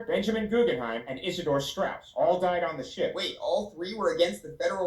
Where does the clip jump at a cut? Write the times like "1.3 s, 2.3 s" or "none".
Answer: 2.0 s